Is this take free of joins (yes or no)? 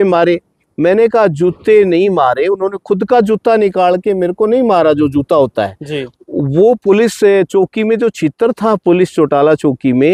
yes